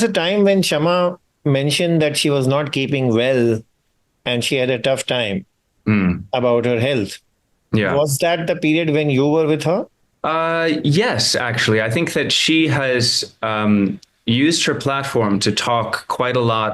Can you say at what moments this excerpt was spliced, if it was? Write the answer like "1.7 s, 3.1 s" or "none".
none